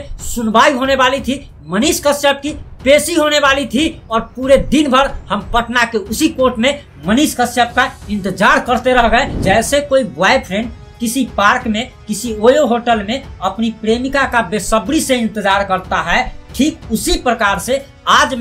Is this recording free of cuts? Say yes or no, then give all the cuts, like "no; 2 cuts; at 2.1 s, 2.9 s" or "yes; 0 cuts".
no; 1 cut; at 9.3 s